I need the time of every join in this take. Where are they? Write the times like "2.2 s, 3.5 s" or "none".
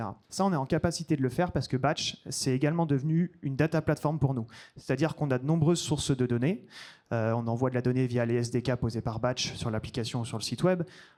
none